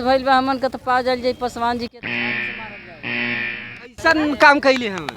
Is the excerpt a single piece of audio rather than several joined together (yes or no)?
no